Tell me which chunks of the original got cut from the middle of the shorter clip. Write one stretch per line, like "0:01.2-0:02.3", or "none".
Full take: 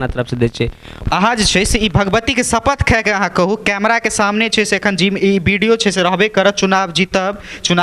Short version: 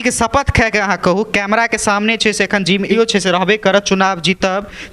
0:05.3-0:05.7